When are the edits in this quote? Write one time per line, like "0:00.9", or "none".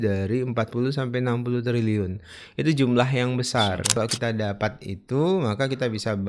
0:04.0